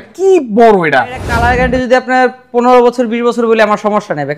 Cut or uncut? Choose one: cut